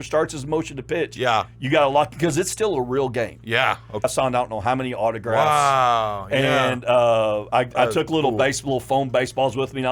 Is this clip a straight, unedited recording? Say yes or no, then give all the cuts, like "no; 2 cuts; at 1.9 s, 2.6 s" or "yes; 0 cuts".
no; 1 cut; at 4.0 s